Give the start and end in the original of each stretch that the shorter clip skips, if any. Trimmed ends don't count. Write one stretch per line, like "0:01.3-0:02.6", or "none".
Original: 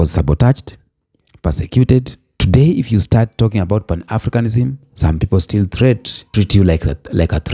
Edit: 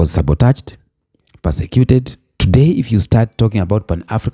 none